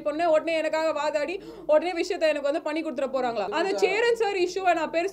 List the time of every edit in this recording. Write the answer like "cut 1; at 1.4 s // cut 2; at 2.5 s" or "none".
cut 1; at 3.5 s